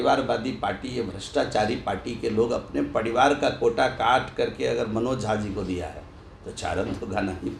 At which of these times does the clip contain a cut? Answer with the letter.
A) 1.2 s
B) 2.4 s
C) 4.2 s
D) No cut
D